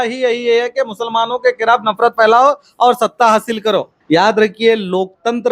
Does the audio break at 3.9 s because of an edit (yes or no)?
yes